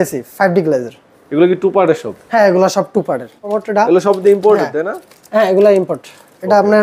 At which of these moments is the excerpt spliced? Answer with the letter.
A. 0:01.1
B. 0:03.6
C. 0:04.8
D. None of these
B